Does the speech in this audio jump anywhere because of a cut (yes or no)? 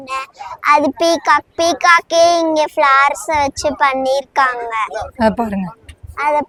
no